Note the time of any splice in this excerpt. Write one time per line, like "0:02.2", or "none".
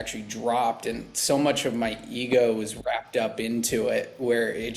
none